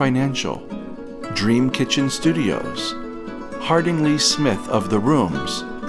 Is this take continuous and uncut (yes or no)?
yes